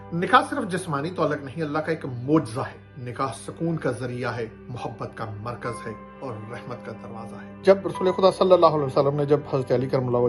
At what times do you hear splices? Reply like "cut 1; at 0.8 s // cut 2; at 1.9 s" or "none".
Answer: none